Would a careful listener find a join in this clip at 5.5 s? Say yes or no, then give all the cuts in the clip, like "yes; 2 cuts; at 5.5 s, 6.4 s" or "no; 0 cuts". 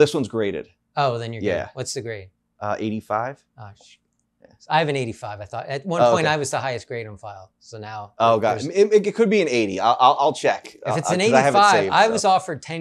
no; 0 cuts